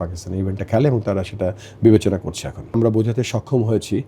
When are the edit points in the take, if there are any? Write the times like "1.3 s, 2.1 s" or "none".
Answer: 2.7 s